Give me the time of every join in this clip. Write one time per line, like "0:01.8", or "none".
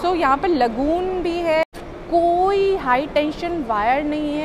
0:01.6